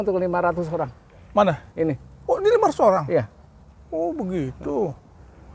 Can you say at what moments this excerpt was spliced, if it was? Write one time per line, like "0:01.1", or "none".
none